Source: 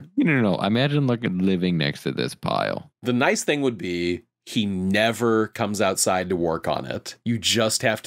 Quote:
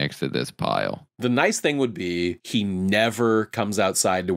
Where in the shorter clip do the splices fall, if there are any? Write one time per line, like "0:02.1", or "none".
0:02.4